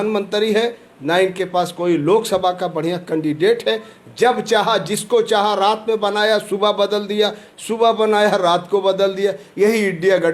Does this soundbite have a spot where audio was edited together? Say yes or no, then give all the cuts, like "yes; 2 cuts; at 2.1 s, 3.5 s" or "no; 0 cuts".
no; 0 cuts